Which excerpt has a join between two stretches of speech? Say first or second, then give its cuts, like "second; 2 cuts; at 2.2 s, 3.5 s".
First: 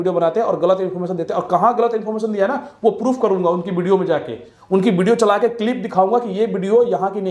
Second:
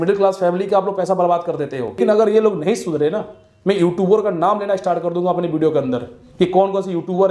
second; 1 cut; at 2.0 s